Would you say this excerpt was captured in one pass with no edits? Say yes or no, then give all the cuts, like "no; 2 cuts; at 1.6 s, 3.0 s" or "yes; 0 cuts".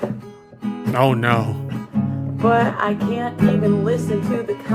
yes; 0 cuts